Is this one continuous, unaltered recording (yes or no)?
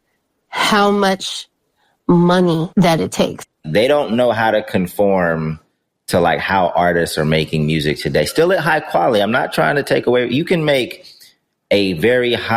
no